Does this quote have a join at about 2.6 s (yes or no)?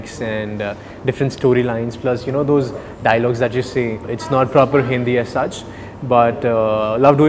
no